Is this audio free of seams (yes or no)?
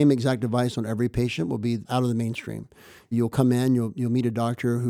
no